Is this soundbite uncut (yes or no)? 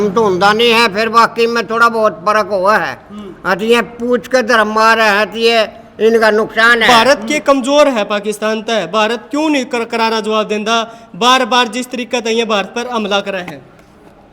no